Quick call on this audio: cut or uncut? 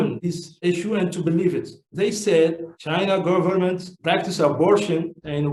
uncut